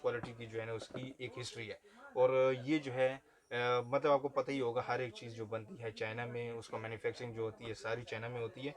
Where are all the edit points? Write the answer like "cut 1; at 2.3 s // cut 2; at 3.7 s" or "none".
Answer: none